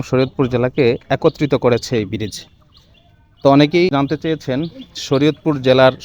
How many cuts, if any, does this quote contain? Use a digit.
1